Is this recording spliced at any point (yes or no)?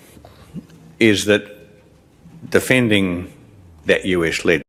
no